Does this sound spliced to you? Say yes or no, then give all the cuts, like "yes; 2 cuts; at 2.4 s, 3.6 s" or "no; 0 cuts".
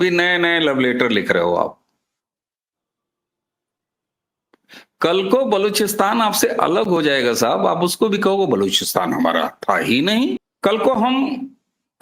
yes; 1 cut; at 10.5 s